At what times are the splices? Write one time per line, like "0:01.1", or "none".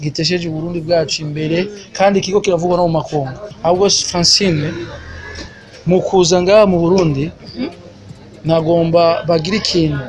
0:03.4